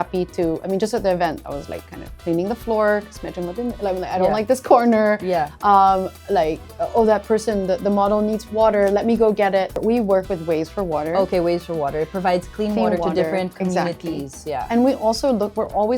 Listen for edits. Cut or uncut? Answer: cut